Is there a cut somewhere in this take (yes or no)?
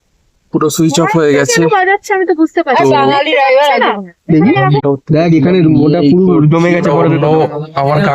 yes